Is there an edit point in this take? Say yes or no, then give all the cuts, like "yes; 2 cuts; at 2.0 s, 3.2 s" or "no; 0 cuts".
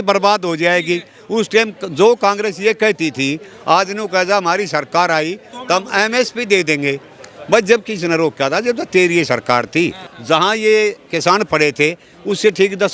yes; 1 cut; at 10.1 s